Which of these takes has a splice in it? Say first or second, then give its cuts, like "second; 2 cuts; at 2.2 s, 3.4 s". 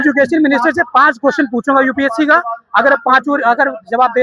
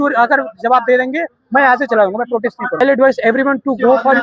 second; 1 cut; at 2.8 s